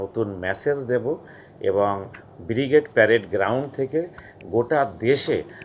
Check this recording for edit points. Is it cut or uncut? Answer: uncut